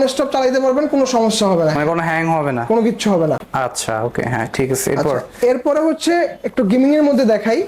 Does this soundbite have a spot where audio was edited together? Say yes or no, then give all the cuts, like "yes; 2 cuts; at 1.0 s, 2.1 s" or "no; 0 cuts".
no; 0 cuts